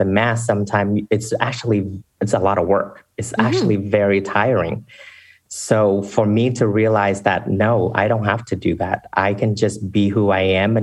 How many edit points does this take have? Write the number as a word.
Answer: zero